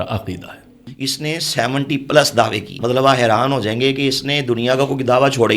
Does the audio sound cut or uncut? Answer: cut